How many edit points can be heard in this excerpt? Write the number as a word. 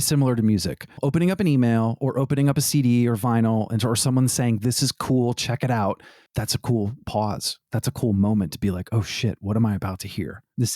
one